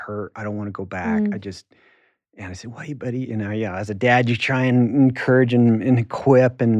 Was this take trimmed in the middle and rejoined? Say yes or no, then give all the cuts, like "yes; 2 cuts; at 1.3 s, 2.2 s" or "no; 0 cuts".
no; 0 cuts